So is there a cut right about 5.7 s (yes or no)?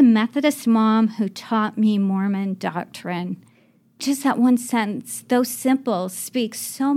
no